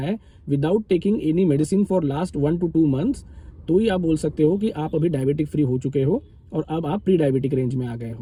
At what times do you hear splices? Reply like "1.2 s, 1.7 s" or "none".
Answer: none